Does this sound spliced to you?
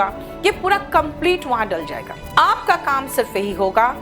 yes; 1 cut; at 2.1 s

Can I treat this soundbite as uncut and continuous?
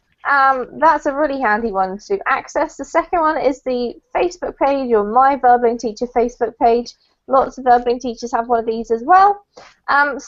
yes; 0 cuts

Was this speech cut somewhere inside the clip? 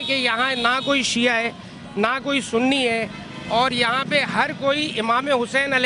no; 0 cuts

